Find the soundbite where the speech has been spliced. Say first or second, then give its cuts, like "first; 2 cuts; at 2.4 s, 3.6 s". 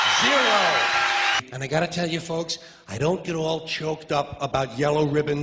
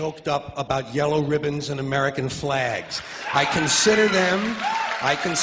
first; 1 cut; at 1.4 s